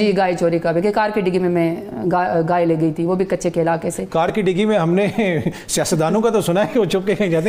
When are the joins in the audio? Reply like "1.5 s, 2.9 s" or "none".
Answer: none